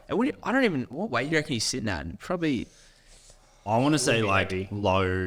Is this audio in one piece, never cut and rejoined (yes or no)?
yes